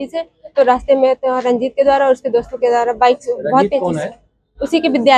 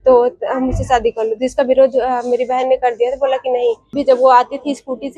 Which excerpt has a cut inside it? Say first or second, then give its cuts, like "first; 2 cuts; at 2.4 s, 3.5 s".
second; 1 cut; at 4.0 s